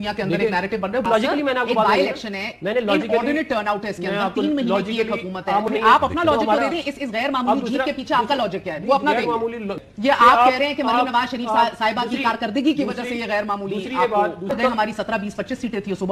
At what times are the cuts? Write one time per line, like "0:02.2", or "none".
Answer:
0:01.0
0:05.7
0:09.8
0:14.5